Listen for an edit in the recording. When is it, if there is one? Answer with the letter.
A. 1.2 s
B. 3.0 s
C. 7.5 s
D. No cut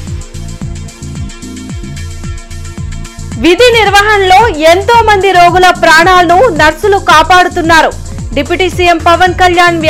A